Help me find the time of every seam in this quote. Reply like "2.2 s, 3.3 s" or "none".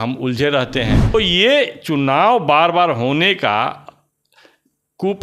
1.1 s